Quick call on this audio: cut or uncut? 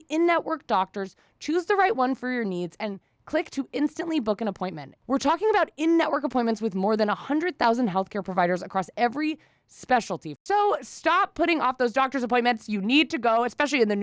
cut